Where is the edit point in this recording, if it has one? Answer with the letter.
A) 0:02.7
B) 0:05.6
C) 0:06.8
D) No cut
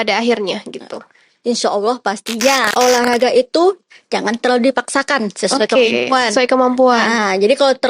A